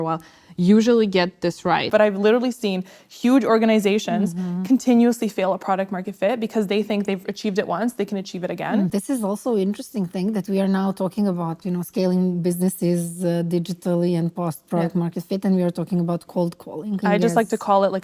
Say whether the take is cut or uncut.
cut